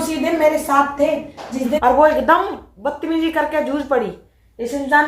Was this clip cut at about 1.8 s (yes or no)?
yes